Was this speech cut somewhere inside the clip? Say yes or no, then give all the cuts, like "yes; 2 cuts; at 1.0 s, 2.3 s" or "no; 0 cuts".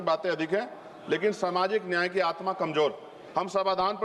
yes; 1 cut; at 3.1 s